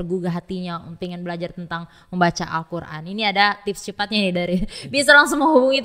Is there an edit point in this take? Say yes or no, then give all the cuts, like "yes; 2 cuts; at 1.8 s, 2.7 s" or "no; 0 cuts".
no; 0 cuts